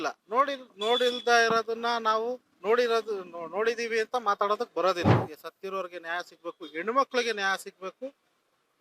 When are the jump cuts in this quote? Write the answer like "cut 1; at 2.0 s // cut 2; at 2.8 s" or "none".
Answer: cut 1; at 5.2 s